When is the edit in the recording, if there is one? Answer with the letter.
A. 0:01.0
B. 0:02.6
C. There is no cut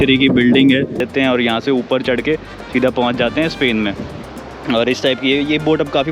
A